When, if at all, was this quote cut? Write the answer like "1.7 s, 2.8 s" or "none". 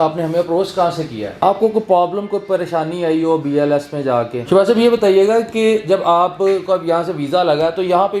1.3 s, 4.4 s